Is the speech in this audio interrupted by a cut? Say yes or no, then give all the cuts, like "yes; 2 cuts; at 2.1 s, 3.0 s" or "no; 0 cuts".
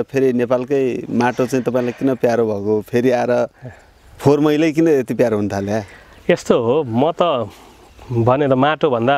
no; 0 cuts